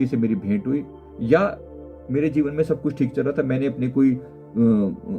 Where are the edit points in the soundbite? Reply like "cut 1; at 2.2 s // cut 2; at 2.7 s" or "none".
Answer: none